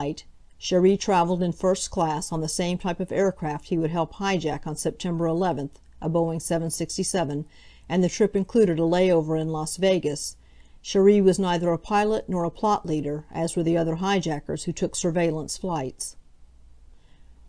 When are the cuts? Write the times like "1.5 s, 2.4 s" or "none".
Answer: none